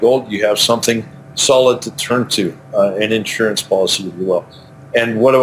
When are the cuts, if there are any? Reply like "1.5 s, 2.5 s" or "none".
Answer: none